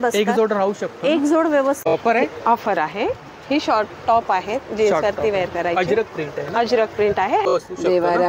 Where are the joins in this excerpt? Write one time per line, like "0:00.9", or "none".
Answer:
0:01.9
0:07.5

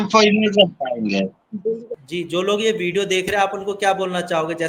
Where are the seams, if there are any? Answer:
0:01.9

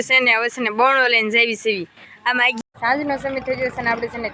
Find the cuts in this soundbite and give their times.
0:02.5

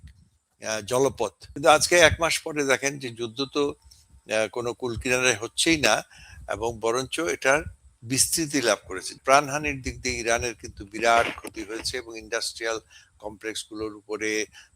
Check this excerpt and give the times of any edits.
0:01.4
0:09.1

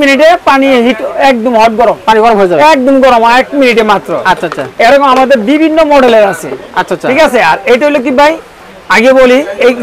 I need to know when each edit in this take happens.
none

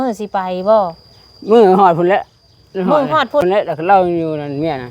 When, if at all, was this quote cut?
0:03.4

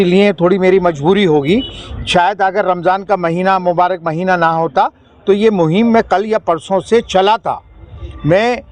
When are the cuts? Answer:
none

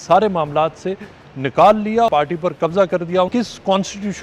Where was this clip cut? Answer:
0:02.1
0:03.3

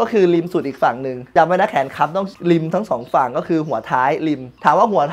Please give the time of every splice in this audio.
0:01.1
0:02.3

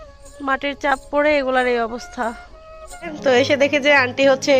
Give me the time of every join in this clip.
0:03.2

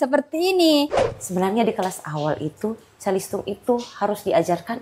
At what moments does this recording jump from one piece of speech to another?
0:01.0

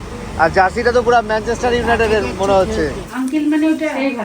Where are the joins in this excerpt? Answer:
0:03.0

